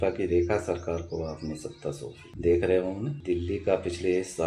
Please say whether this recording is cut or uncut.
cut